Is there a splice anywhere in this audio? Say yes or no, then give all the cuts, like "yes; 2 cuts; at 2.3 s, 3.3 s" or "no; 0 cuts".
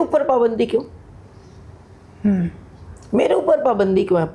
no; 0 cuts